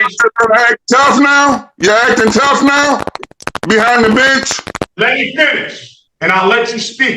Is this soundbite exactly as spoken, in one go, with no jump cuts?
no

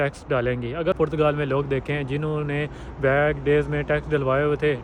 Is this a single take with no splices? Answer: no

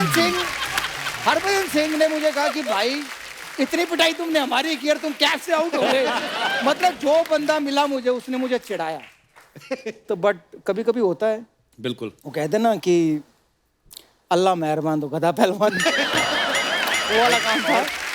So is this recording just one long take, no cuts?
yes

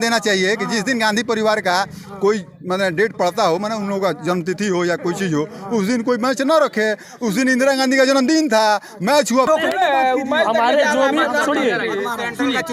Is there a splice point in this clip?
yes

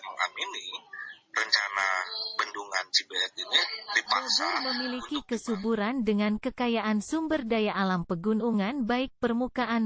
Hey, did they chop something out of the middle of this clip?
yes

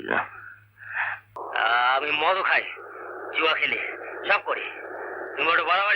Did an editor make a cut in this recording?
yes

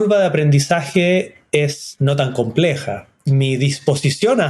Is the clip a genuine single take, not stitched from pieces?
no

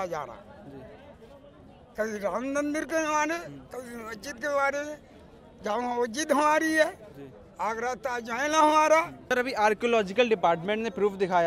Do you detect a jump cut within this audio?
yes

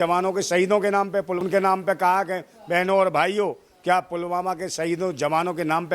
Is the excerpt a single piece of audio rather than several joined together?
no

